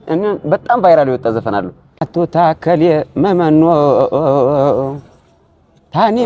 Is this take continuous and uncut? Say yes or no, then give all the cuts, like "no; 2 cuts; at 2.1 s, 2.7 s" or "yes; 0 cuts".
no; 1 cut; at 1.9 s